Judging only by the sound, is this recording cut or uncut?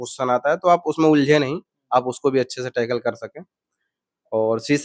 uncut